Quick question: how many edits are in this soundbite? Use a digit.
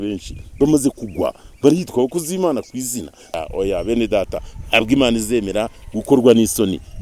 1